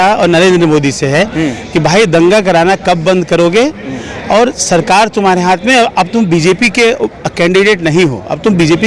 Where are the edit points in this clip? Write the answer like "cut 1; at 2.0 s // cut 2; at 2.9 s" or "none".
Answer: none